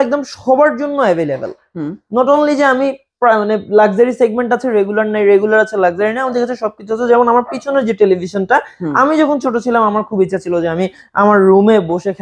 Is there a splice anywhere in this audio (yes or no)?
no